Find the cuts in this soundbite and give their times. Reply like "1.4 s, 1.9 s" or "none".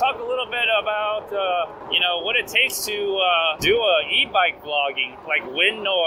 1.8 s, 3.6 s, 5.1 s